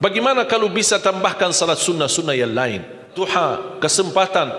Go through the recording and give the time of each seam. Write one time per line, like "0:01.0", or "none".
0:03.2

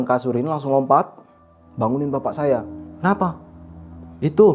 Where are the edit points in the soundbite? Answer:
0:02.8

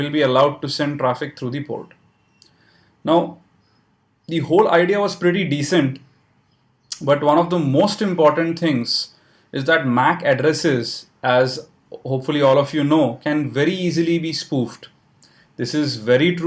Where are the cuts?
0:05.0

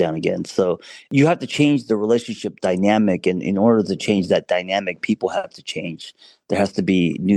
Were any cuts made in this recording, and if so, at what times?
0:01.1

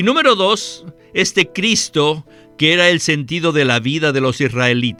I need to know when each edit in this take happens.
none

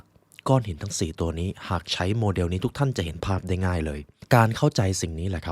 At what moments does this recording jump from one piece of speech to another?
0:04.1

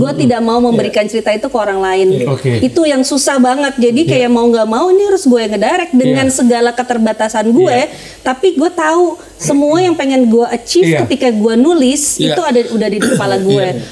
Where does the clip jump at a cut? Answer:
none

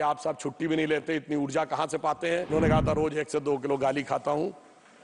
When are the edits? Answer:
0:02.5

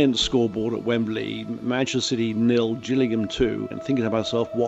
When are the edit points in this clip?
0:03.7

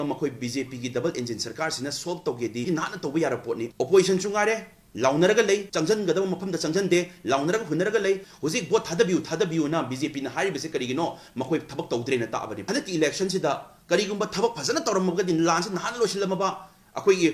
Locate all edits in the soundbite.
0:08.2
0:12.5

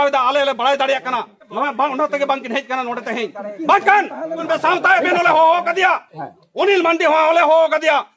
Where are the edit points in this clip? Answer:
0:01.6
0:04.5

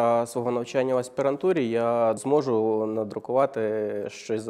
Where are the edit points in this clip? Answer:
0:02.2

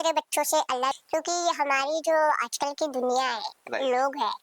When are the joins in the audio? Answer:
0:00.9

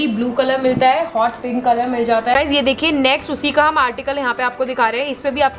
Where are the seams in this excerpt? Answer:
0:02.3

